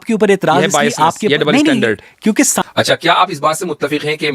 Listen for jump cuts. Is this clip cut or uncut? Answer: cut